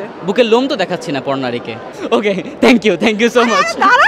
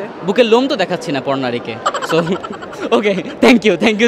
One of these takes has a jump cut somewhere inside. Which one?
first; 1 cut; at 1.8 s

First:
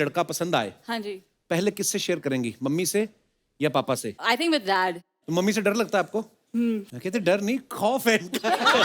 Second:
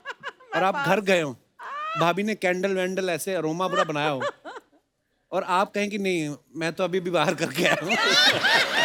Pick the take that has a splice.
first; 3 cuts; at 4.1 s, 5.3 s, 6.9 s

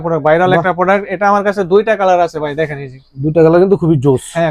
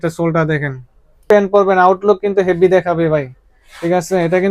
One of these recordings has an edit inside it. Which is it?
second; 1 cut; at 1.2 s

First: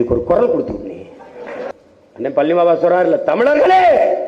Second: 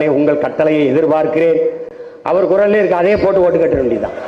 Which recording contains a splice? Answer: first; 1 cut; at 1.6 s

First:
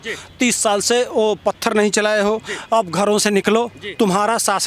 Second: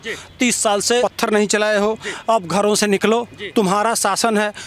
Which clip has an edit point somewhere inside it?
second; 1 cut; at 1.0 s

